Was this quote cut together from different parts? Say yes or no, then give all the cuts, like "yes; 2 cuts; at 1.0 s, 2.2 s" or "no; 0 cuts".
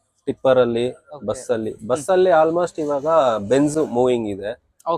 no; 0 cuts